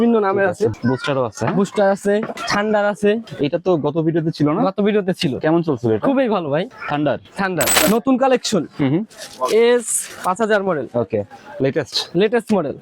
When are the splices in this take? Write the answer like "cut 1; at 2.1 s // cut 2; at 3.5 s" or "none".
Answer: cut 1; at 0.8 s // cut 2; at 2.4 s // cut 3; at 3.2 s // cut 4; at 6.7 s // cut 5; at 7.8 s // cut 6; at 10.0 s